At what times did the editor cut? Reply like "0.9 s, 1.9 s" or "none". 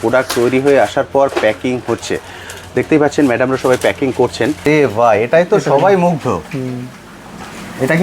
4.7 s